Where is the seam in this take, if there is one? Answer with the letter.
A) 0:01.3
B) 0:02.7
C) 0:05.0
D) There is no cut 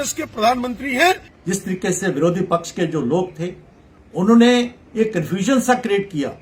A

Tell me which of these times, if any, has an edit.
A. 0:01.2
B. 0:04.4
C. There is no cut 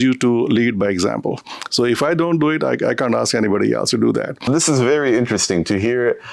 B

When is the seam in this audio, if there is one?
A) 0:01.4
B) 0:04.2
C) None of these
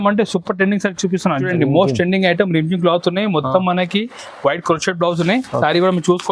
A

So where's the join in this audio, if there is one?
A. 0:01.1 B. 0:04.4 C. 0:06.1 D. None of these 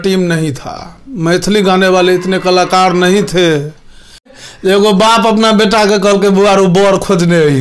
B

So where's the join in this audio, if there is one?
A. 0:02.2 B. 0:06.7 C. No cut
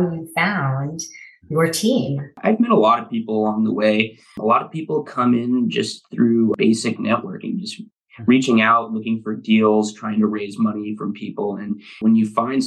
A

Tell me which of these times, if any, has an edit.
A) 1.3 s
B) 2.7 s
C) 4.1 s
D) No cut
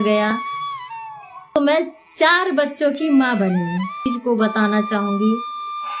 C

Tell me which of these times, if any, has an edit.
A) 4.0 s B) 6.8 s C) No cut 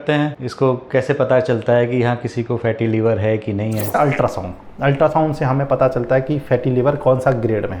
A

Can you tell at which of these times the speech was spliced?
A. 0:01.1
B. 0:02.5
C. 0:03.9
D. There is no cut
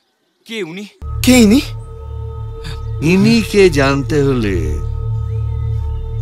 A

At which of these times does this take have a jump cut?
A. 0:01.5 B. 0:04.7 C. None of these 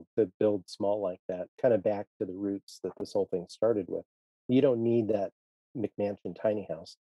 A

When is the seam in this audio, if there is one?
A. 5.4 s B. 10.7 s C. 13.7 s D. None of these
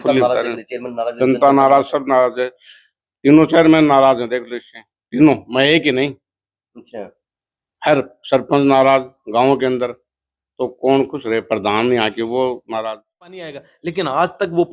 C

